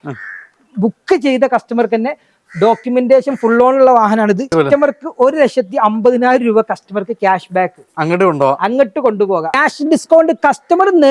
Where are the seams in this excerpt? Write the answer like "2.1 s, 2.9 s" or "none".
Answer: 4.5 s, 9.6 s